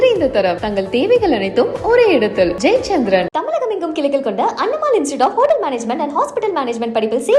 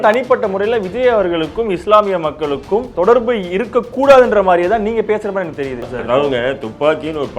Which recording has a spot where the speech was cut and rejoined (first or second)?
second